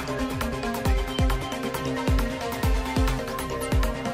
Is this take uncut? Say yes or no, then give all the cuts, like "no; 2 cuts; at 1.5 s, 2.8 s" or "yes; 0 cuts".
no; 1 cut; at 1.6 s